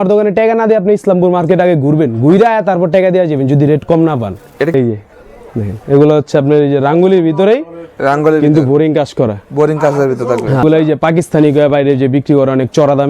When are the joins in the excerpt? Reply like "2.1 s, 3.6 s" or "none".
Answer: 4.7 s, 10.6 s